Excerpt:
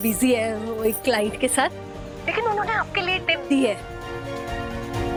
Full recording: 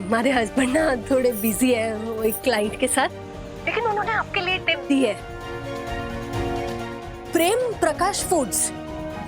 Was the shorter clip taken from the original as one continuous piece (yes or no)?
yes